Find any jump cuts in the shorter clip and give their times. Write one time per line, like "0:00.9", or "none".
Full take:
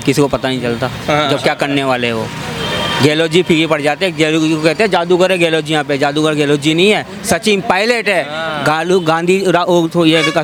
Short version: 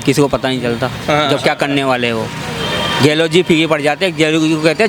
none